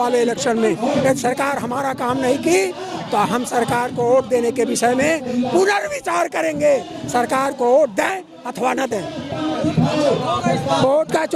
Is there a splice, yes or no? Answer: no